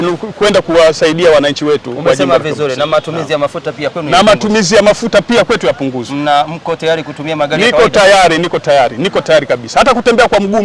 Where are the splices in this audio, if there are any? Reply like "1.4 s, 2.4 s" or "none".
none